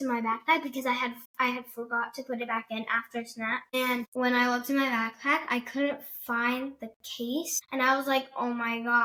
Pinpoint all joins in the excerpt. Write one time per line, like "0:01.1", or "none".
none